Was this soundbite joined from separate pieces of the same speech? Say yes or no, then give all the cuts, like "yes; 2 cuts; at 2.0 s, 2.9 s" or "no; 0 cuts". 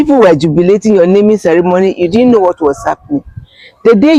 no; 0 cuts